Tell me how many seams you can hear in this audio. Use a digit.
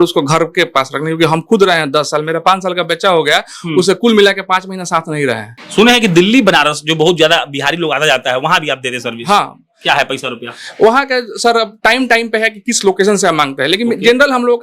1